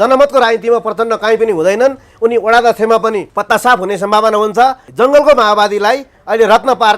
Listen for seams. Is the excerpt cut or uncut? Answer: cut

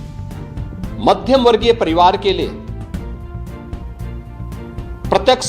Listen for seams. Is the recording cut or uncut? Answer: cut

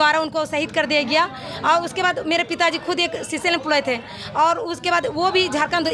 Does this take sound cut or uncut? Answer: uncut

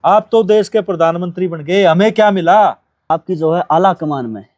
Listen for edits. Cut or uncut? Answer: cut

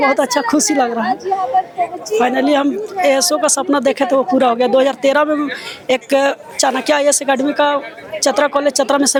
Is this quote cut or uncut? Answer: uncut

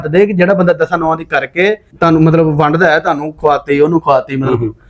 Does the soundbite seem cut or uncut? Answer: cut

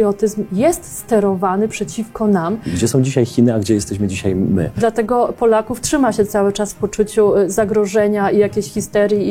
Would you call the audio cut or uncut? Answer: cut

